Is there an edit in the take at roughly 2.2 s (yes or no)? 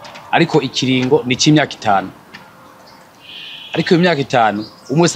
no